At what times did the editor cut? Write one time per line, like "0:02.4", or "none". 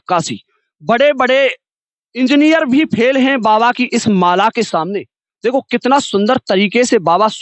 none